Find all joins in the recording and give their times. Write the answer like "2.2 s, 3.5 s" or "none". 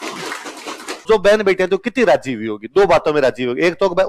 1.0 s

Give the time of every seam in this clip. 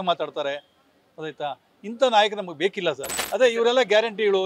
3.1 s

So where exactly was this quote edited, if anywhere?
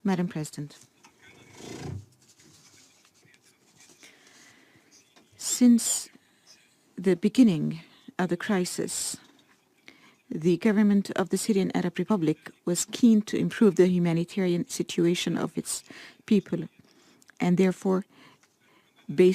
16.4 s

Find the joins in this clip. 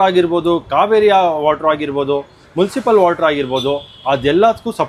none

